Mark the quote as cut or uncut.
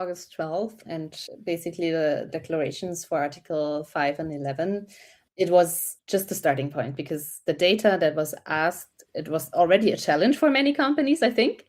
cut